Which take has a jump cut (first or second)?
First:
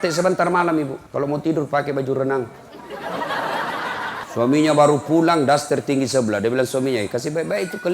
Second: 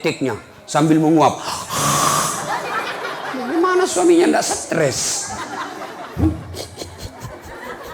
first